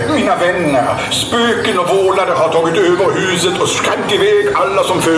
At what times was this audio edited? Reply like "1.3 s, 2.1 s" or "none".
none